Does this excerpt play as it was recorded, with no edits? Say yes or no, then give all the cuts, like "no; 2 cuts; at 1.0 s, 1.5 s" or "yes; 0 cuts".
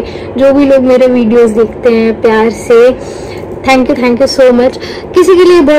yes; 0 cuts